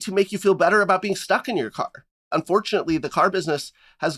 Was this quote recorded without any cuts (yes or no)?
no